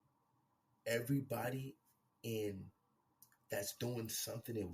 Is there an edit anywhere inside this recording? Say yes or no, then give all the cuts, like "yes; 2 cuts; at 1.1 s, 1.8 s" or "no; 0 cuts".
no; 0 cuts